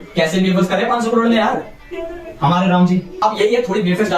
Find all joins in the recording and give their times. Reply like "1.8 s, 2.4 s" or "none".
3.1 s